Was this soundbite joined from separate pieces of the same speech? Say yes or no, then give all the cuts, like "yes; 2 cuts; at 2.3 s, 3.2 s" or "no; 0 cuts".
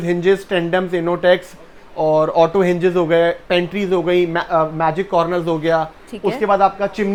no; 0 cuts